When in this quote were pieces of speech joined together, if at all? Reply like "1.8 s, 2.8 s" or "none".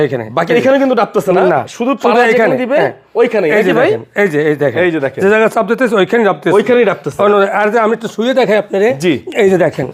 none